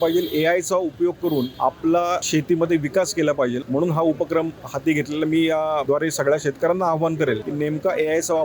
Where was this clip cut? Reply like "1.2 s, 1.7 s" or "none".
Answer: 1.5 s, 2.2 s, 3.6 s, 5.8 s, 7.5 s

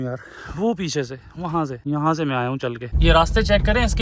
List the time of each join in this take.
1.8 s, 2.9 s

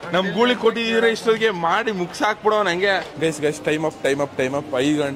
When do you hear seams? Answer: 3.1 s

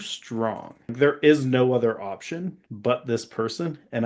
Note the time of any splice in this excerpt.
0.9 s

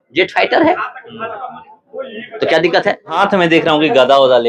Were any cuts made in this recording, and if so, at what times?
3.1 s

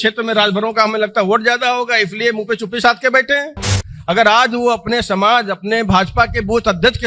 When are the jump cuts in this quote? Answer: none

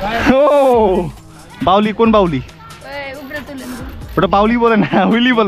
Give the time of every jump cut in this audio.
none

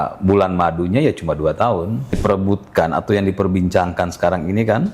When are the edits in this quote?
2.2 s

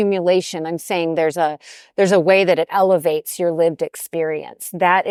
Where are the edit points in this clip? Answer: none

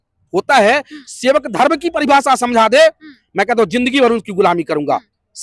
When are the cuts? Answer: none

